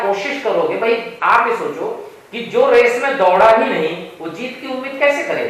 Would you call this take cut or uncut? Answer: uncut